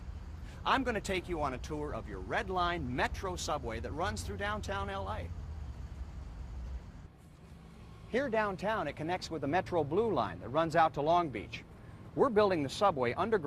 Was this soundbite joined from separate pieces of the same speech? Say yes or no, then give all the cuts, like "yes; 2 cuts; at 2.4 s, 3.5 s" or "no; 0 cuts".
yes; 1 cut; at 2.9 s